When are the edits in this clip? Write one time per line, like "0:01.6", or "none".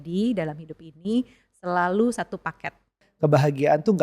0:03.0